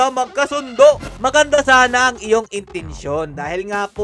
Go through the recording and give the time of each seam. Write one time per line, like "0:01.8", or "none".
0:01.1